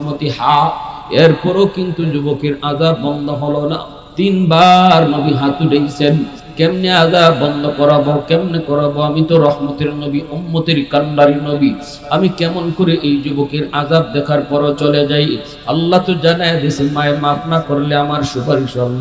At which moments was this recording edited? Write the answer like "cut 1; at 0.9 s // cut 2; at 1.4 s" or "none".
cut 1; at 6.4 s